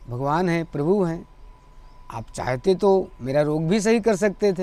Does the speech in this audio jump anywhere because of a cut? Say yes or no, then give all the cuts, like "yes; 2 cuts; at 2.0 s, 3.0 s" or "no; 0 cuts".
no; 0 cuts